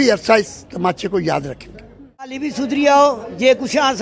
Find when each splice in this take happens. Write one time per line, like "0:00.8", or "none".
0:02.4